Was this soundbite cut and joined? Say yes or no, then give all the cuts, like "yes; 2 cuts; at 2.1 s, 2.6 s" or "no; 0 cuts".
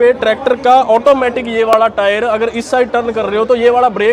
no; 0 cuts